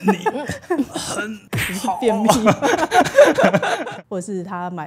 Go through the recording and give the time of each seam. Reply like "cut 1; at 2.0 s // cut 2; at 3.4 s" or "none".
cut 1; at 1.4 s // cut 2; at 3.8 s